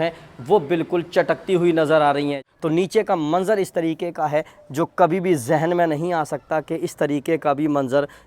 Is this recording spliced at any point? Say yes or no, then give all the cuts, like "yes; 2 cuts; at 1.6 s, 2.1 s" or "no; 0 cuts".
yes; 1 cut; at 2.5 s